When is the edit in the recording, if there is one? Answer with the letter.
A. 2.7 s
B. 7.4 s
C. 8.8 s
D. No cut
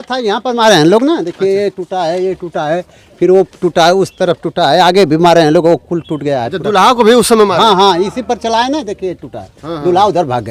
D